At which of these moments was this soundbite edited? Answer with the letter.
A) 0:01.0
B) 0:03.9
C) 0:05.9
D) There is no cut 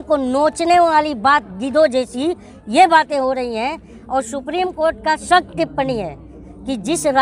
D